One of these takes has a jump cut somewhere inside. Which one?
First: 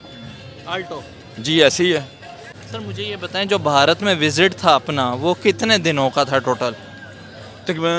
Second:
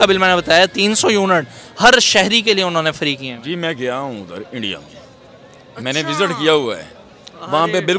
first; 1 cut; at 2.6 s

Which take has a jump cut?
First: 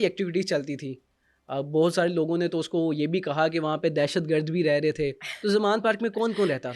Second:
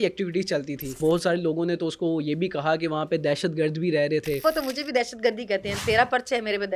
second; 2 cuts; at 0.9 s, 4.4 s

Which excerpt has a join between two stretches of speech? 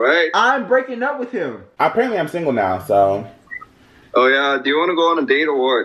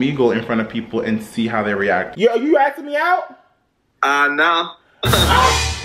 second; 1 cut; at 2.1 s

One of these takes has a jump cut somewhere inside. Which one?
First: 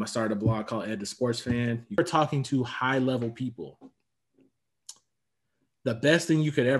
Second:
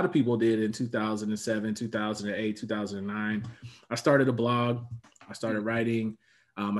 first; 1 cut; at 2.0 s

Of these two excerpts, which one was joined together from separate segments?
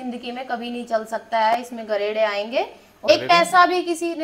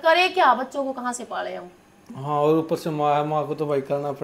first; 1 cut; at 3.1 s

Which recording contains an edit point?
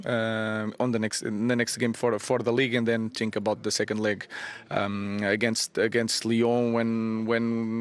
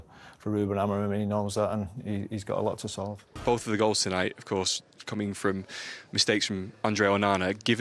second; 1 cut; at 3.2 s

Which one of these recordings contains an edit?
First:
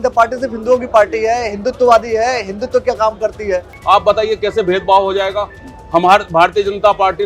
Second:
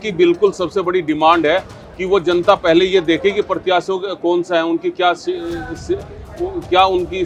first; 1 cut; at 3.7 s

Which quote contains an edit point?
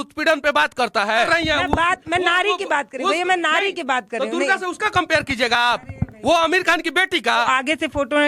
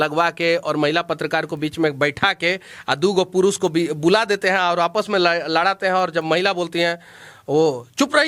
first; 2 cuts; at 1.3 s, 7.4 s

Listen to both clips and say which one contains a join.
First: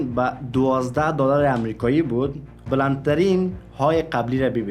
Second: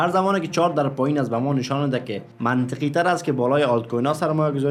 first; 1 cut; at 2.6 s

